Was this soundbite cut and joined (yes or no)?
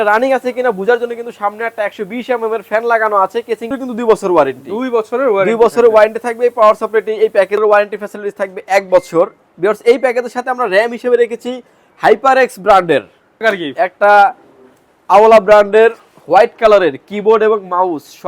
yes